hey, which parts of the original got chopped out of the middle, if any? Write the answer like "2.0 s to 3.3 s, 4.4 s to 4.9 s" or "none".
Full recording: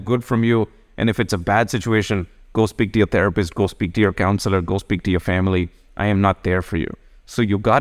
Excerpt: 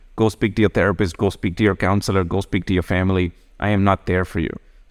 none